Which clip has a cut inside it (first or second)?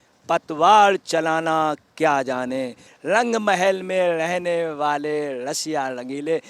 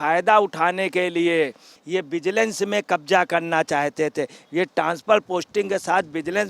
second